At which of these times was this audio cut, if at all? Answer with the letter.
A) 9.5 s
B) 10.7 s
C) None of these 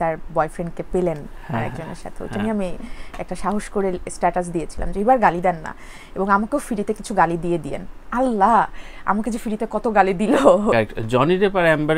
B